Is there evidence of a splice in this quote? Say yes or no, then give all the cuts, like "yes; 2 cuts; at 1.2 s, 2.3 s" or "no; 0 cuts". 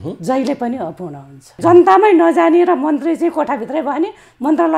yes; 1 cut; at 1.6 s